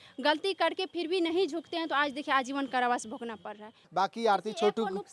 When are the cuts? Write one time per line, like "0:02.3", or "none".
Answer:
0:03.8